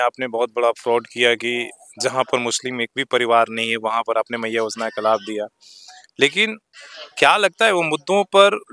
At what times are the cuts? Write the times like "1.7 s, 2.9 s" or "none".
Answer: none